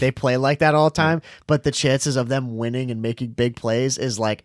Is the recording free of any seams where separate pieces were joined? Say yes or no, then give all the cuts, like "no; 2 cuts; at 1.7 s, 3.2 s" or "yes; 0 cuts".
yes; 0 cuts